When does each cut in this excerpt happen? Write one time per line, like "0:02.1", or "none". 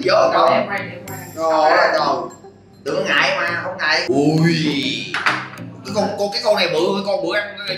none